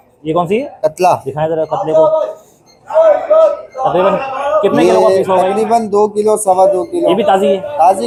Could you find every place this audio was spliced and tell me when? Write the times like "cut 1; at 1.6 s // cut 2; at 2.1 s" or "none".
none